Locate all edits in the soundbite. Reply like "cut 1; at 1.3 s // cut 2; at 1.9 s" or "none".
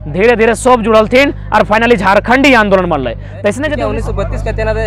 cut 1; at 3.7 s